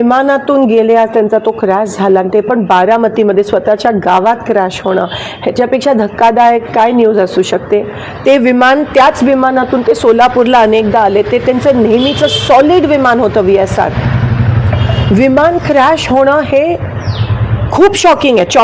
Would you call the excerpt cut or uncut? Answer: uncut